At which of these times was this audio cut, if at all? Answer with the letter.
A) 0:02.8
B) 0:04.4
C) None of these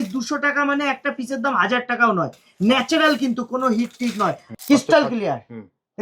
B